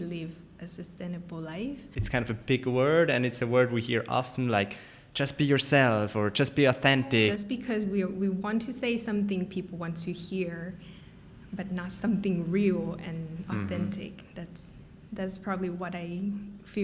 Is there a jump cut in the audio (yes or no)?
yes